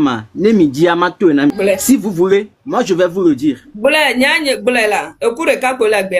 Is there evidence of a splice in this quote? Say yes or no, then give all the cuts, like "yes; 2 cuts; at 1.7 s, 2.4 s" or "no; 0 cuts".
no; 0 cuts